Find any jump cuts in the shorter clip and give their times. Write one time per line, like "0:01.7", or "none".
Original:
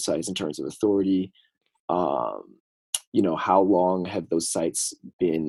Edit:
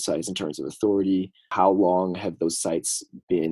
0:01.5